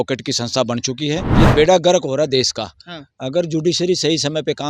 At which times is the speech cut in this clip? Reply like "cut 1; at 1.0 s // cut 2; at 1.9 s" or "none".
cut 1; at 1.3 s